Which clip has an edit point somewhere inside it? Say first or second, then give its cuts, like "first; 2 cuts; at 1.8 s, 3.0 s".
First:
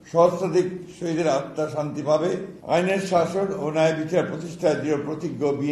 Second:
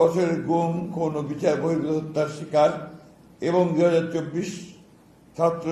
first; 1 cut; at 2.5 s